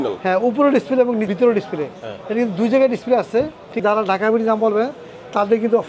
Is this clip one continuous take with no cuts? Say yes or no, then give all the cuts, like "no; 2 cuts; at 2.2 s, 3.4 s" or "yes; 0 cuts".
no; 2 cuts; at 1.3 s, 3.8 s